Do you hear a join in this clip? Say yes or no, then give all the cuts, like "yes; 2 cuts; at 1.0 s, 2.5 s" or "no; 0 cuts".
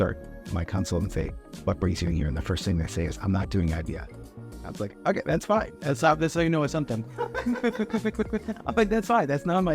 no; 0 cuts